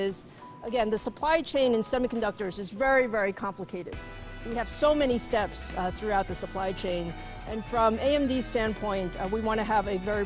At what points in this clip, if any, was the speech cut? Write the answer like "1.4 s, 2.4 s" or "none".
none